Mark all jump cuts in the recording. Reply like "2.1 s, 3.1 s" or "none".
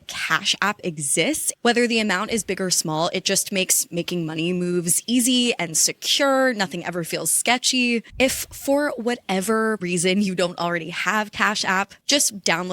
1.5 s, 8.1 s, 9.8 s